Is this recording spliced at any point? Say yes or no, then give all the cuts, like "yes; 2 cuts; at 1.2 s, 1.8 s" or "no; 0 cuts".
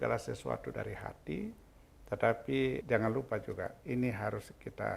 yes; 1 cut; at 2.8 s